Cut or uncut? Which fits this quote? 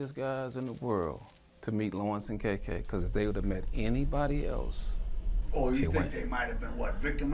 cut